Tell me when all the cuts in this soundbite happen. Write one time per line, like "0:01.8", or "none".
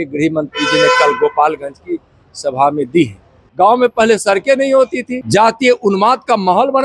0:03.4
0:05.2